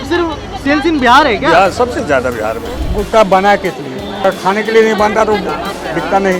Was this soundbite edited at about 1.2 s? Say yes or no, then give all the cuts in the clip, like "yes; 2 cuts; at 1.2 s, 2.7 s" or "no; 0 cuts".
no; 2 cuts; at 2.7 s, 4.2 s